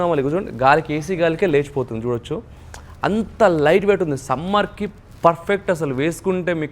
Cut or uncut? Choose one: uncut